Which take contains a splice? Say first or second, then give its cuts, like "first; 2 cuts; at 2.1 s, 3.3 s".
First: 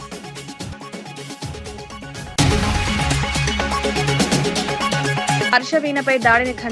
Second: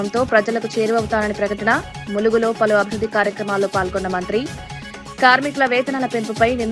first; 1 cut; at 2.1 s